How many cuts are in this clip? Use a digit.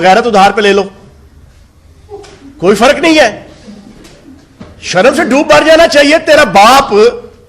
0